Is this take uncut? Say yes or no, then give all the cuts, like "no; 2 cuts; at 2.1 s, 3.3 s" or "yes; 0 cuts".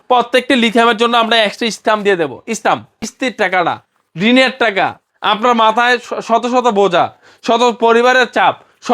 no; 1 cut; at 3.1 s